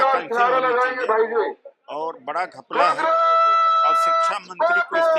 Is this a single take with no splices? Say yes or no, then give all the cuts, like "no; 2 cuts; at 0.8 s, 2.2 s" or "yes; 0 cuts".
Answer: yes; 0 cuts